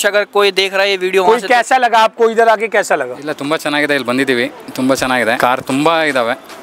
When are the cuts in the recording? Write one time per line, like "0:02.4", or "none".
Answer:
0:05.4